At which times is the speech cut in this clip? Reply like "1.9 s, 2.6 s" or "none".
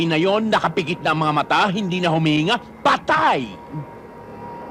none